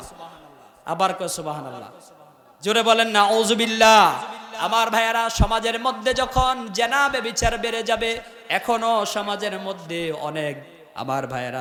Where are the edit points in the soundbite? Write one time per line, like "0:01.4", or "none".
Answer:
none